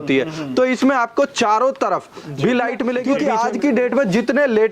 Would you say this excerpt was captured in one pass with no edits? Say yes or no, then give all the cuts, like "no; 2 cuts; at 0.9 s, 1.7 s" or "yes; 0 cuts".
no; 1 cut; at 3.1 s